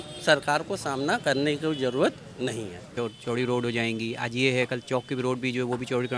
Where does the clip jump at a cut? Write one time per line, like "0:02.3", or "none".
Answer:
0:02.9